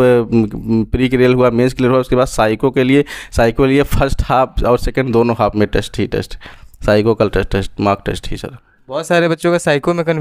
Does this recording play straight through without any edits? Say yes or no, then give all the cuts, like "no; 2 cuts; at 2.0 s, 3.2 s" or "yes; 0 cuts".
yes; 0 cuts